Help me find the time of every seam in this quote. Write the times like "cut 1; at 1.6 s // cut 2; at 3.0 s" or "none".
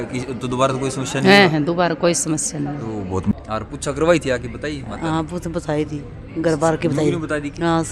cut 1; at 3.3 s